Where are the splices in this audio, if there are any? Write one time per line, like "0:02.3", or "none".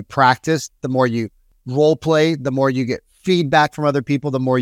none